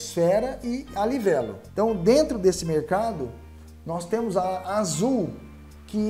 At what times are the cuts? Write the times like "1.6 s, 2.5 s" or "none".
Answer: 1.6 s